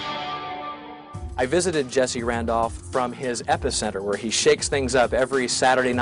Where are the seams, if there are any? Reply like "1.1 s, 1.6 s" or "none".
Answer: 4.3 s